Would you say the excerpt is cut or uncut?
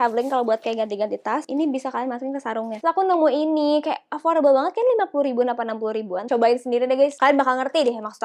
cut